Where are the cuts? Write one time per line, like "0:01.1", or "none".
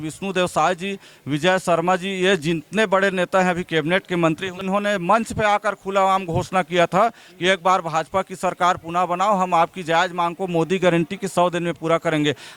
0:04.6